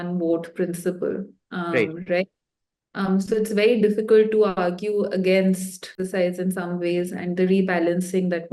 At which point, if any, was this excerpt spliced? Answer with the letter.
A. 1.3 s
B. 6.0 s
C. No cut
C